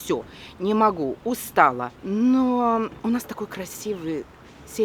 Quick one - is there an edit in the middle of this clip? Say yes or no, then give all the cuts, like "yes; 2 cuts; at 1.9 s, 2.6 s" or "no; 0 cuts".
yes; 2 cuts; at 1.9 s, 3.0 s